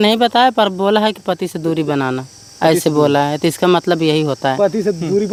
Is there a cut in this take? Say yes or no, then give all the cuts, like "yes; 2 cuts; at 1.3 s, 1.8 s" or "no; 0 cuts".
no; 0 cuts